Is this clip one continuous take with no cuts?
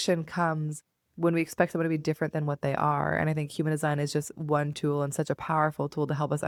yes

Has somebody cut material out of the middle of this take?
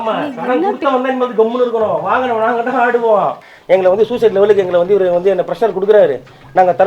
yes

